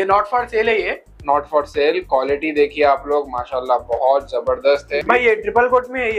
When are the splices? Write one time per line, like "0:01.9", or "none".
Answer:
0:04.8

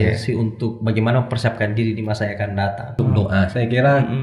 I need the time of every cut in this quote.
0:03.0

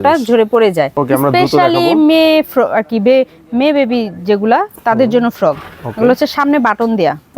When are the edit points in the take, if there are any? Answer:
0:00.9

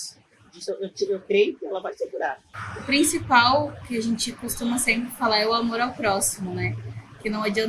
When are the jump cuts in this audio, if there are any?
0:02.7

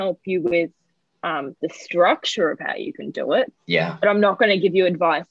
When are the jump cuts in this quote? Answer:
none

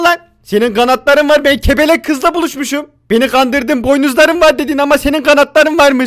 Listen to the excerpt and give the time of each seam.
none

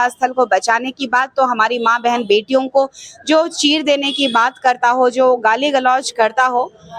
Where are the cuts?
none

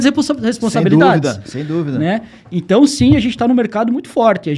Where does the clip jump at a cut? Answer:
none

